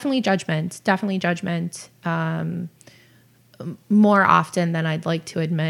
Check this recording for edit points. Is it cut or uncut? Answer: uncut